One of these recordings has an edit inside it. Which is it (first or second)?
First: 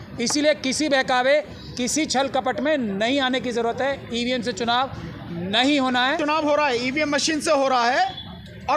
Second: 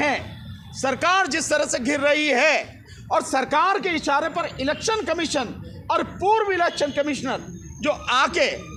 first